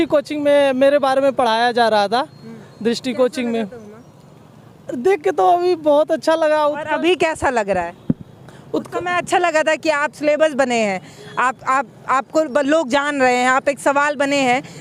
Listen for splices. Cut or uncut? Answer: uncut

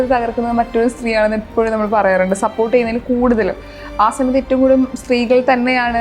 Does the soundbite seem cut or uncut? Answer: uncut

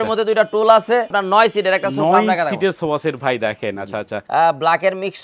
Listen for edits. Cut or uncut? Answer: cut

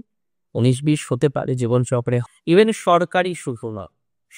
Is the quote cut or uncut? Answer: cut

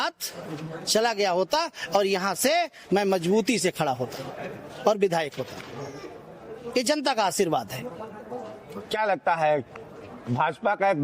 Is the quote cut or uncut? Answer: uncut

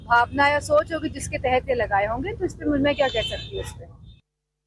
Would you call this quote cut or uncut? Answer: uncut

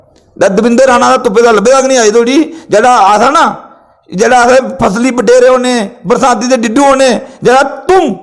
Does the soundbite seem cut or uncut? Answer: uncut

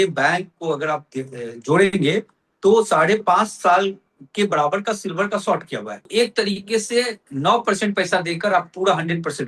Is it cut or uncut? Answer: cut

